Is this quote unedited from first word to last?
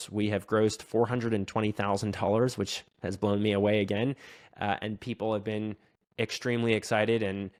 yes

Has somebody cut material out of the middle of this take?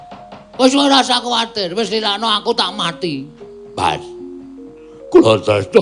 no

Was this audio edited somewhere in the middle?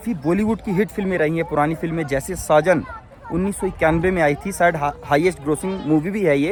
no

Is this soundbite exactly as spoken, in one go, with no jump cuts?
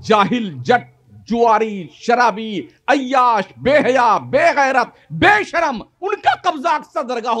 yes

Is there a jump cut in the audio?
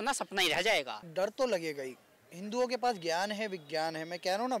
yes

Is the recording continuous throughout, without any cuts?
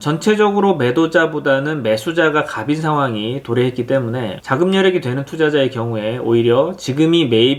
yes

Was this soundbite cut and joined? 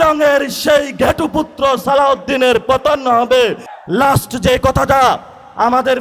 yes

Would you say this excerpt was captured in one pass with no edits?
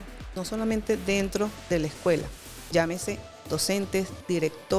yes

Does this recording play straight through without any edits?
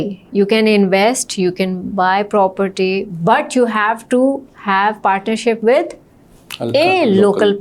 yes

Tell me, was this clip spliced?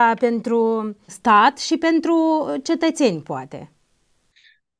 no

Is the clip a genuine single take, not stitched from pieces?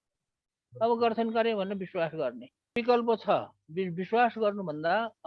no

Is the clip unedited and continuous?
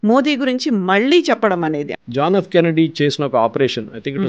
no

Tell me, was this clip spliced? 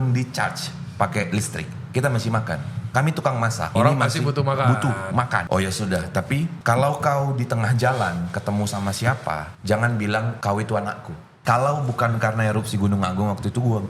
yes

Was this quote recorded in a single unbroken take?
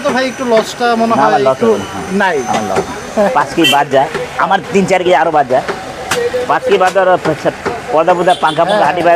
yes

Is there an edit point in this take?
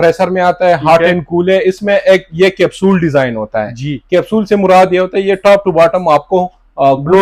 no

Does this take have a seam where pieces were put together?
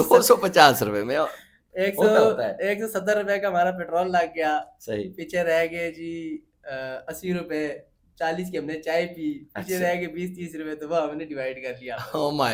no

